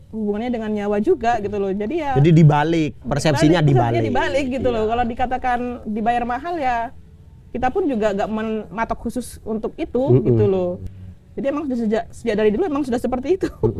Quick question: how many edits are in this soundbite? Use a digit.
0